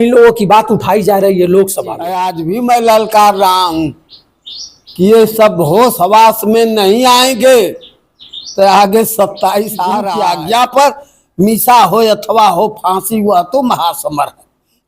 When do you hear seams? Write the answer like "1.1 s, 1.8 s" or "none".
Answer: 2.3 s, 10.1 s